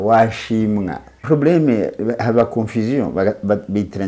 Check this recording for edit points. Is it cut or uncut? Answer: cut